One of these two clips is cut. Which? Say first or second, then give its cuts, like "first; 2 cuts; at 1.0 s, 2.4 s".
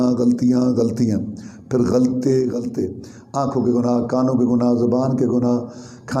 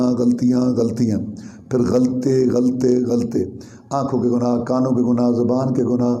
first; 1 cut; at 2.6 s